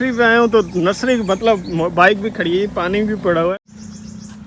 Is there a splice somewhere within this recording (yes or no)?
yes